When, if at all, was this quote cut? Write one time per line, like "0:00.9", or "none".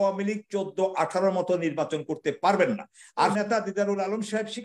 0:03.3